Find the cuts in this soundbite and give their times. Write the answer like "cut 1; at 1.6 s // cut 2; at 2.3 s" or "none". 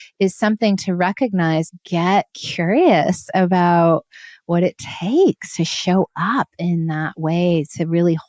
cut 1; at 1.8 s

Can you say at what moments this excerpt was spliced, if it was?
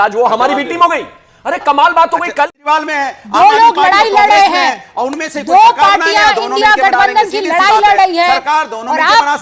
cut 1; at 2.6 s

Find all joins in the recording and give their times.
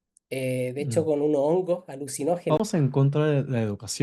cut 1; at 2.7 s

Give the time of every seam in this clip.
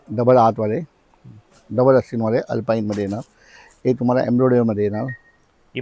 none

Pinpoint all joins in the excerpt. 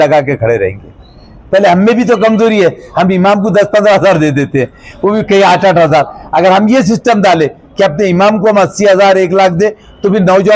none

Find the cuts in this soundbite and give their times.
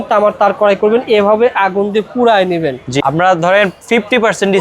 cut 1; at 3.0 s

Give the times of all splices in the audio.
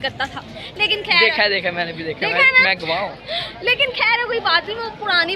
none

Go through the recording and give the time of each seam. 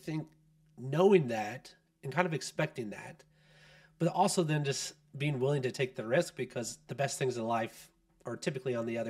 none

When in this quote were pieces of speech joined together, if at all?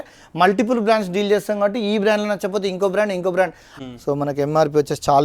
cut 1; at 3.7 s

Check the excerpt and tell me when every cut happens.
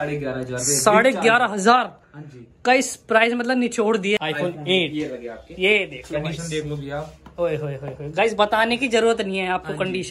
cut 1; at 4.2 s

